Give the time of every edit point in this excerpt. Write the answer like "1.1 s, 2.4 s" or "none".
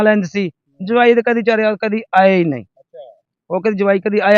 none